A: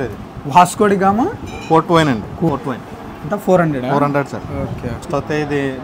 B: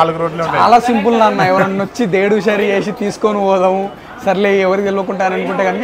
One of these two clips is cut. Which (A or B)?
A